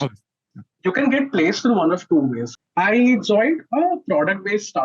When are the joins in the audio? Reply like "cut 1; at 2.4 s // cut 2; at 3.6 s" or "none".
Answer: cut 1; at 2.5 s